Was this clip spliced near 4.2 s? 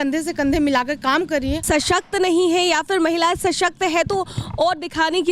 no; 1 cut; at 1.6 s

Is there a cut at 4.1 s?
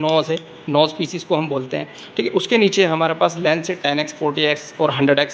no; 0 cuts

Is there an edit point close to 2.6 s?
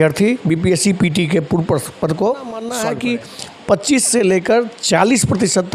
yes; 1 cut; at 2.6 s

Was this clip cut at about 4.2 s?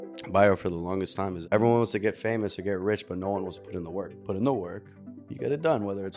yes; 2 cuts; at 1.4 s, 4.2 s

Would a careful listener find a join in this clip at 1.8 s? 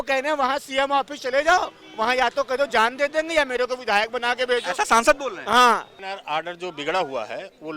no; 1 cut; at 6.0 s

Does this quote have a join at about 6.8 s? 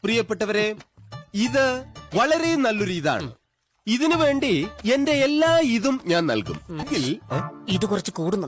yes; 1 cut; at 6.8 s

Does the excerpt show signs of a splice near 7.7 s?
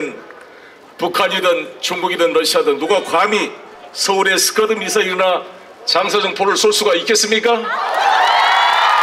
no; 0 cuts

